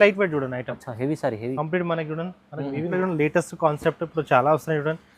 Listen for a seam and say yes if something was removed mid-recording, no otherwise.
yes